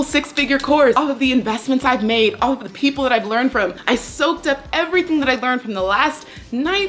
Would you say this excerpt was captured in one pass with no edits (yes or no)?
no